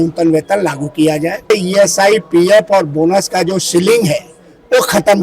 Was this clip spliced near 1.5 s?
yes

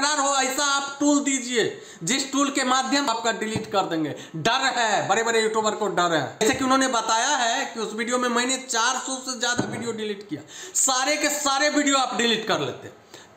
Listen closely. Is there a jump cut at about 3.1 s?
yes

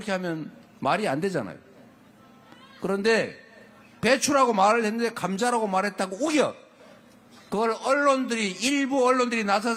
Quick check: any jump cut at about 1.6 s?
no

